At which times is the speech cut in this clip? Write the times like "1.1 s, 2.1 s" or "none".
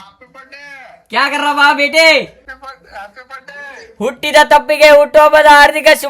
2.5 s